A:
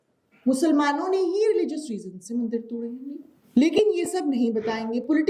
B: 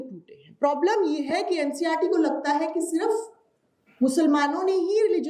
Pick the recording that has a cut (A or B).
A